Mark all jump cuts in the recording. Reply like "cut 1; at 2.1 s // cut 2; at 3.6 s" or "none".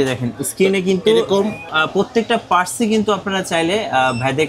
cut 1; at 1.7 s